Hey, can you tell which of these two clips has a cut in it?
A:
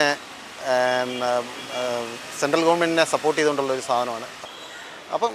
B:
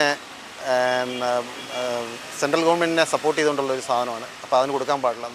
A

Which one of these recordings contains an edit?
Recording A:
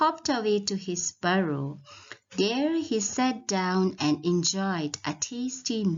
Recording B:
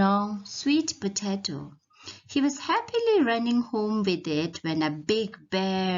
B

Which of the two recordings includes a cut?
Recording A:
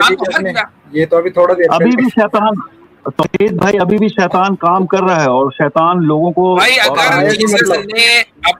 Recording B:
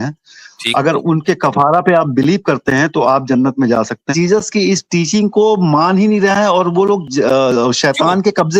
B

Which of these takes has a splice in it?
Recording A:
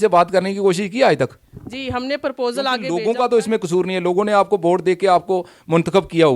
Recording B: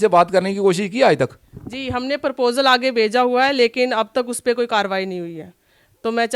A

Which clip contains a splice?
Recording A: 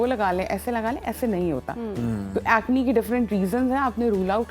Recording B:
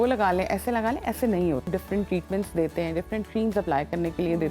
B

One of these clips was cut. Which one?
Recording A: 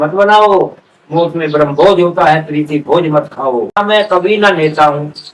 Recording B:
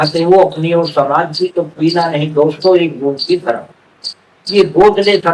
A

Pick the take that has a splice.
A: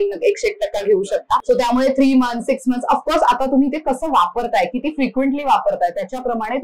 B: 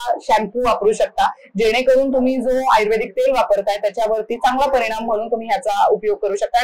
A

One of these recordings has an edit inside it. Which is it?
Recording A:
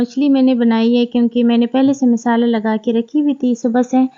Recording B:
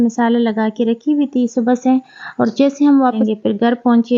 B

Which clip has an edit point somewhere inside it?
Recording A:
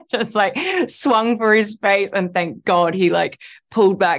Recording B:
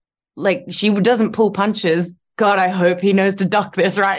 B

